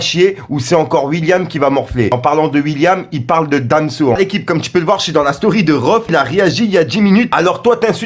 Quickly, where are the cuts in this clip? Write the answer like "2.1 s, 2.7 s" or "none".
2.1 s, 4.2 s, 6.1 s, 7.3 s